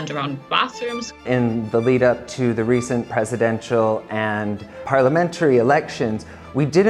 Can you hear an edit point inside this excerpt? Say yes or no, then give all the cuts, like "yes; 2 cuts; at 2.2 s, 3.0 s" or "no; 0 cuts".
yes; 2 cuts; at 1.2 s, 4.8 s